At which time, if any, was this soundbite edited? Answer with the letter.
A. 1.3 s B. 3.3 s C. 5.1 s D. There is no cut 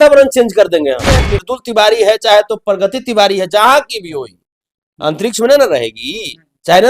A